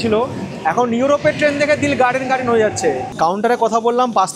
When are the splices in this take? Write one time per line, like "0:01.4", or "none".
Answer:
0:03.1